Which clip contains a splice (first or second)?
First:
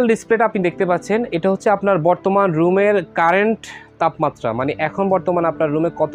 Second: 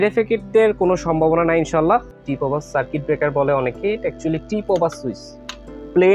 second